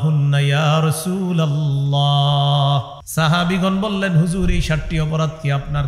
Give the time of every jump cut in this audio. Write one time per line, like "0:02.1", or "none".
0:03.0